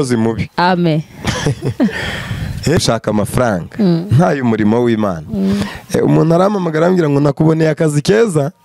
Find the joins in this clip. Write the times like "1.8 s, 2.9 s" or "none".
2.8 s